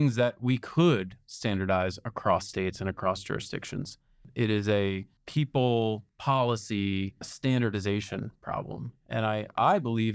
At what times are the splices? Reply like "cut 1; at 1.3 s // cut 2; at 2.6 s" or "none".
cut 1; at 4.3 s // cut 2; at 5.1 s // cut 3; at 6.1 s // cut 4; at 7.3 s